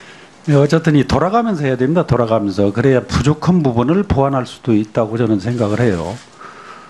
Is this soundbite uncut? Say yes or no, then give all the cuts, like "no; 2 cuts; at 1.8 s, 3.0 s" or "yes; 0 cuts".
no; 1 cut; at 2.7 s